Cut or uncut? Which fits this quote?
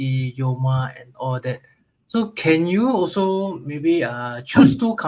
uncut